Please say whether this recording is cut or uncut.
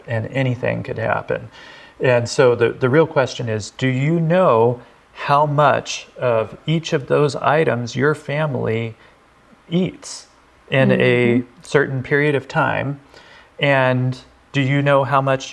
uncut